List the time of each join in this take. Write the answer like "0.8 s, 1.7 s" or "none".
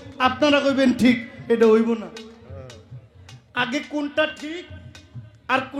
none